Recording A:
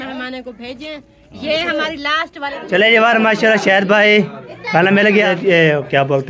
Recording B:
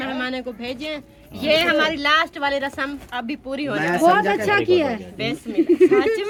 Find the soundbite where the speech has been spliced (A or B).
A